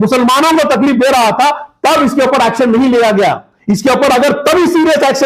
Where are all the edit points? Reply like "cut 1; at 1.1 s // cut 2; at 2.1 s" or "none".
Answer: none